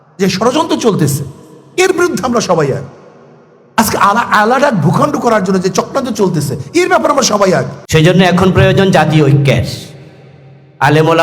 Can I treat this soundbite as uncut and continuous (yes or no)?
no